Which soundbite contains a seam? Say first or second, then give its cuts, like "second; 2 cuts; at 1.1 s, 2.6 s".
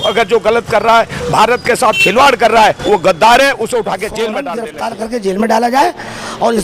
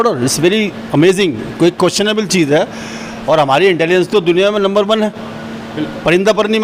first; 1 cut; at 4.5 s